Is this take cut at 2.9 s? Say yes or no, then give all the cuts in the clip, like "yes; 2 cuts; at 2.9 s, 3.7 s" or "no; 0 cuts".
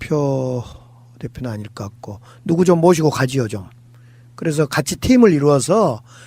no; 1 cut; at 4.6 s